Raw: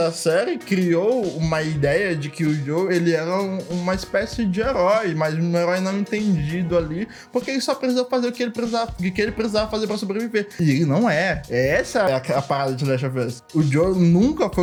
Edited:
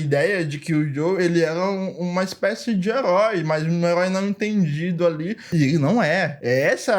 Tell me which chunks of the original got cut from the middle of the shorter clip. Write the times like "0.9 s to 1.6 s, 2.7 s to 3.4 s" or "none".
7.2 s to 10.5 s